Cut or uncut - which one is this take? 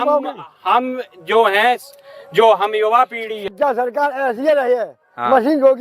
cut